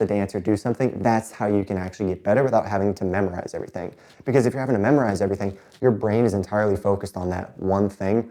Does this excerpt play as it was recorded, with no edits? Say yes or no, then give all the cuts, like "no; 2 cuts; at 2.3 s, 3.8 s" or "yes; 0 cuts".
yes; 0 cuts